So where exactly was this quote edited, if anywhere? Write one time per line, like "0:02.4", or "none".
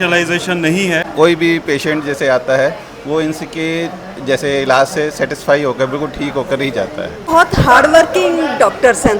0:01.1
0:07.3